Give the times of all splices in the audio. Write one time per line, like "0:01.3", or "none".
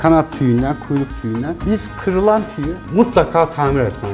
none